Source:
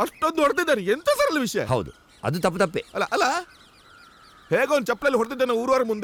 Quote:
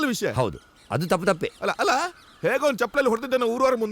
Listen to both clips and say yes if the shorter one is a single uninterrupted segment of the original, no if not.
no